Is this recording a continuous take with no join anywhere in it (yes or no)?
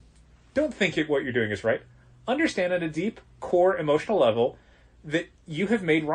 yes